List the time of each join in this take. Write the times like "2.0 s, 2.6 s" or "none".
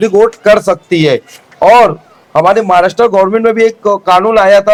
none